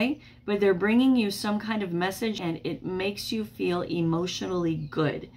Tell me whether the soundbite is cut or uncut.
cut